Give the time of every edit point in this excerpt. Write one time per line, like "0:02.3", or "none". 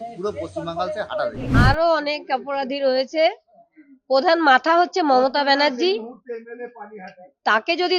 0:01.4